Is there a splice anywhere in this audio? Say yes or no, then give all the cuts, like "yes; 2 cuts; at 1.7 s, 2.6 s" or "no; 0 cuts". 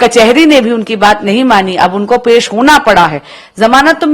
no; 0 cuts